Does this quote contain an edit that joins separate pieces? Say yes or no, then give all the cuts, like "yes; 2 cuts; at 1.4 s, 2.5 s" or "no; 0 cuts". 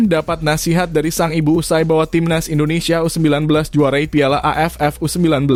no; 0 cuts